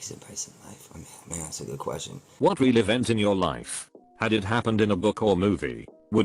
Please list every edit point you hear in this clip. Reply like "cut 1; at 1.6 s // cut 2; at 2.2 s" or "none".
cut 1; at 2.3 s